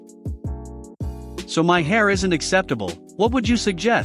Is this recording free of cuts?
no; 1 cut; at 1.4 s

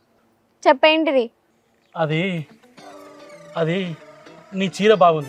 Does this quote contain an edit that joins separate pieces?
no; 0 cuts

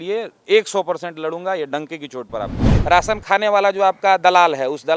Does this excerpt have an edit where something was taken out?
yes; 1 cut; at 2.7 s

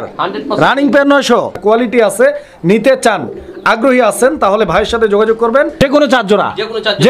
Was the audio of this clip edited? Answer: yes; 2 cuts; at 1.3 s, 5.8 s

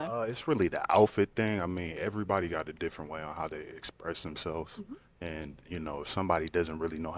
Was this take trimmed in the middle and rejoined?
no; 0 cuts

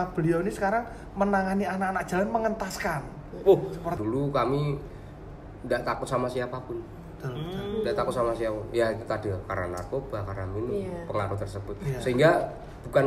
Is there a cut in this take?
yes; 1 cut; at 4.0 s

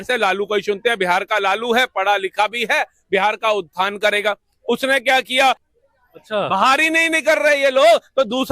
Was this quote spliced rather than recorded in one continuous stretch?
yes; 1 cut; at 5.6 s

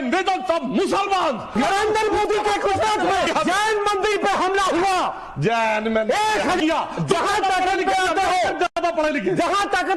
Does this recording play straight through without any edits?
no; 3 cuts; at 1.9 s, 3.3 s, 6.6 s

